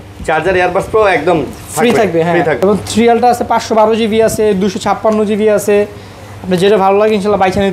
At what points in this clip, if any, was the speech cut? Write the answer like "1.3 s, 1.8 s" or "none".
2.6 s